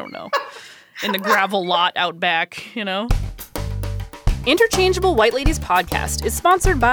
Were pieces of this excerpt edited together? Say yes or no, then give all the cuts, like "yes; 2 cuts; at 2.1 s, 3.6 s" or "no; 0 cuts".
yes; 1 cut; at 3.1 s